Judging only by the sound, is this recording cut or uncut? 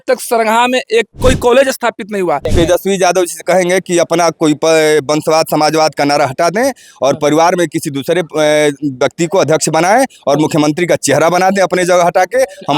cut